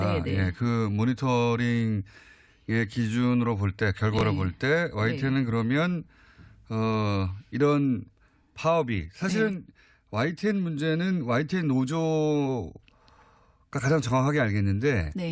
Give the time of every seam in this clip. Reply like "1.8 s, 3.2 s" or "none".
8.1 s